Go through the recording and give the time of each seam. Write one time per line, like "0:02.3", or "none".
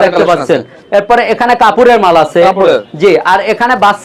none